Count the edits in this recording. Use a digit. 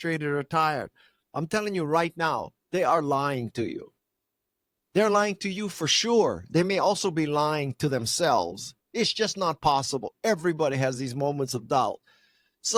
0